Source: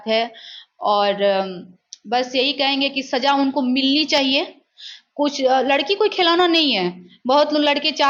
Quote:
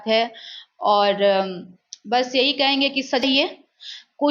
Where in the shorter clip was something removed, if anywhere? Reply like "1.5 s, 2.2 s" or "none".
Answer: 3.2 s